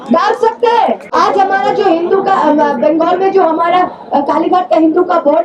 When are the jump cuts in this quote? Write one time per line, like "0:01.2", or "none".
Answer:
0:01.1